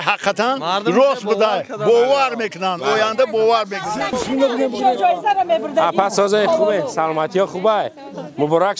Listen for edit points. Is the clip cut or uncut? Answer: cut